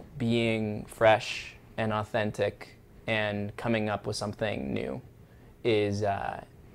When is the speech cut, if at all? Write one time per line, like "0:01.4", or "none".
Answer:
none